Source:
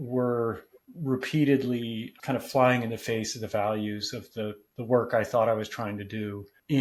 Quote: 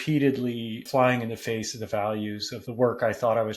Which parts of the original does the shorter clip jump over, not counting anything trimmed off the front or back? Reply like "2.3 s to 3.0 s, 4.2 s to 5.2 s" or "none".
2.1 s to 2.5 s, 4.2 s to 4.7 s